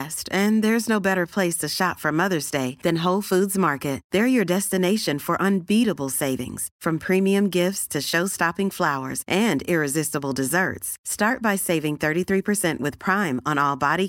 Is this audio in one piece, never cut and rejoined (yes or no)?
yes